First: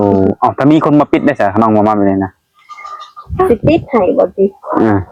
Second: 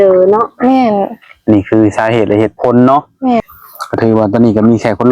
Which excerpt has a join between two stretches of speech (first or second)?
second